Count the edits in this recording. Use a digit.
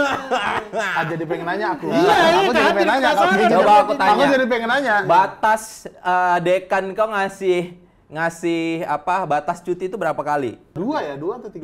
1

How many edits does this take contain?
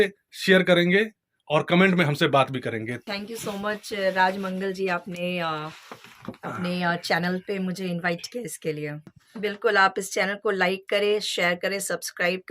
2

